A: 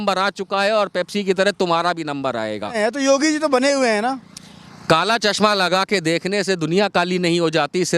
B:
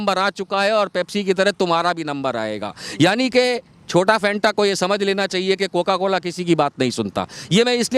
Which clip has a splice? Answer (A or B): A